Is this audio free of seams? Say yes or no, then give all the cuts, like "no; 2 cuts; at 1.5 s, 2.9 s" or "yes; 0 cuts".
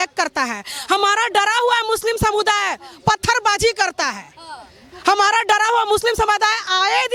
yes; 0 cuts